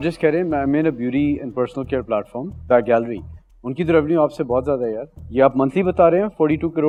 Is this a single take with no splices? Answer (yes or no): yes